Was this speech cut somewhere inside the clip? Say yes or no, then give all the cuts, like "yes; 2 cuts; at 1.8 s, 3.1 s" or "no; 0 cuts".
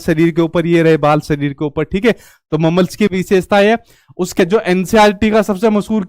yes; 1 cut; at 4.4 s